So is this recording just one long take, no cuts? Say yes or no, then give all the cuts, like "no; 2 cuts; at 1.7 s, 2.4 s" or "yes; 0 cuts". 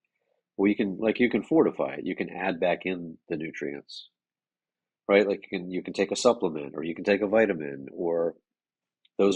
yes; 0 cuts